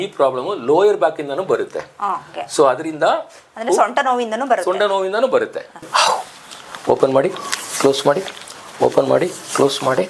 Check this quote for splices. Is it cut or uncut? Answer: cut